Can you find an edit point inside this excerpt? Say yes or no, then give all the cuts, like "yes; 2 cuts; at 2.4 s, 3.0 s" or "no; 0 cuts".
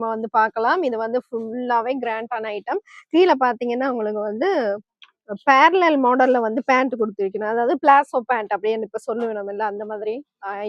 no; 0 cuts